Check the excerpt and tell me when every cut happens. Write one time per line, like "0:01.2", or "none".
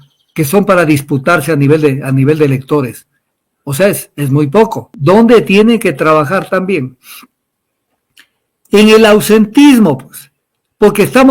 0:04.9

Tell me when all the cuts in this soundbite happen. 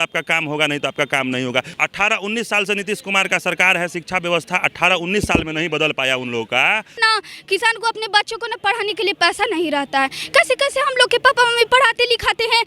0:01.7
0:07.0

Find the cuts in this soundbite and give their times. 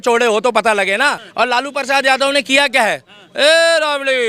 0:01.2

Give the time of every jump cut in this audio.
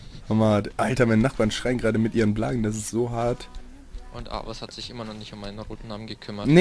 none

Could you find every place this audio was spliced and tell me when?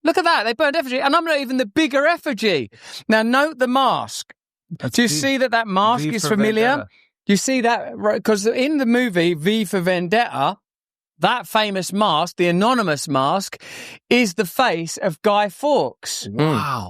0:02.9

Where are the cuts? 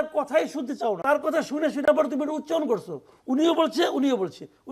0:01.0

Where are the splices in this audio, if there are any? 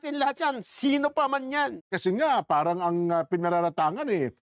0:01.9

